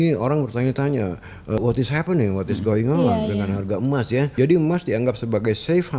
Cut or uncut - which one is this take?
cut